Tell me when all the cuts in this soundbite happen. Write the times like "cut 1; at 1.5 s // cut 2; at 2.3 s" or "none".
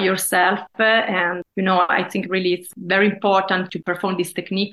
cut 1; at 1.4 s // cut 2; at 2.7 s // cut 3; at 3.7 s